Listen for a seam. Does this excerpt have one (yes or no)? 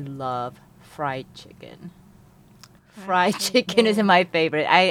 no